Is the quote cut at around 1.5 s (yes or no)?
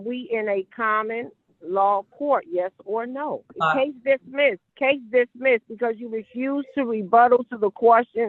no